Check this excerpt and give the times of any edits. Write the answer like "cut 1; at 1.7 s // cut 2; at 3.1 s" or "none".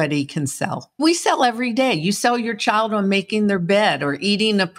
cut 1; at 0.9 s